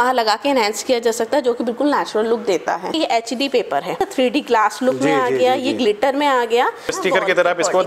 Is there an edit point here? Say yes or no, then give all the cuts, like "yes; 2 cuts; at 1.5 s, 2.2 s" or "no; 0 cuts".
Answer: yes; 3 cuts; at 2.9 s, 4.0 s, 6.9 s